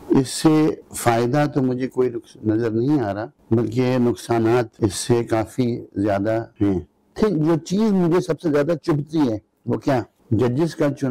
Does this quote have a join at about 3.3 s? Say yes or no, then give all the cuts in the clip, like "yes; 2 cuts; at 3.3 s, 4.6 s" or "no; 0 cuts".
yes; 5 cuts; at 0.9 s, 3.3 s, 4.7 s, 6.9 s, 10.2 s